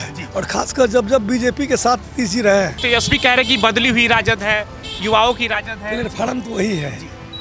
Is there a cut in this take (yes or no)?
yes